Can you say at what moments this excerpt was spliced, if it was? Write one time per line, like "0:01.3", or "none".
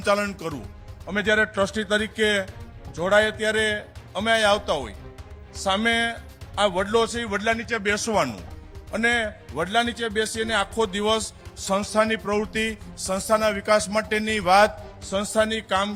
none